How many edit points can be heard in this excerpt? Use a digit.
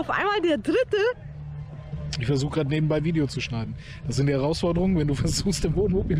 1